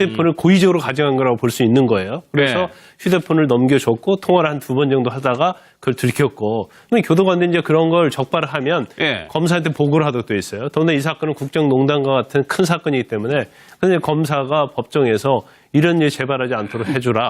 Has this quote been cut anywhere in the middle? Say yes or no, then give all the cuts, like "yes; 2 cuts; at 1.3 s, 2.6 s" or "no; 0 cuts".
yes; 1 cut; at 14.1 s